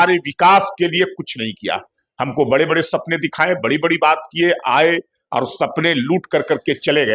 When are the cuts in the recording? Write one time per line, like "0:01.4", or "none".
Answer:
none